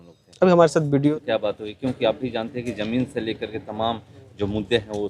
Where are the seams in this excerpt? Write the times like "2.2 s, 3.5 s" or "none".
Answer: 1.1 s